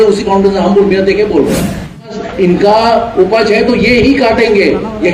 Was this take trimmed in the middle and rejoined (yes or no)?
yes